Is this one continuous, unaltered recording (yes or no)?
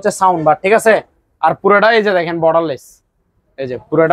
yes